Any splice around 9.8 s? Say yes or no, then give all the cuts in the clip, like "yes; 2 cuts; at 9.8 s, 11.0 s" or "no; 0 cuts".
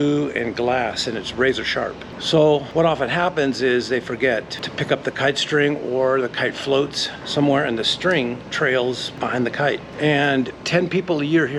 no; 0 cuts